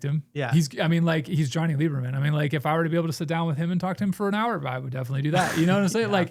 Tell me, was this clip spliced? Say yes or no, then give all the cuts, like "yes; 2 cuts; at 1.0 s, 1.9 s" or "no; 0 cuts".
no; 0 cuts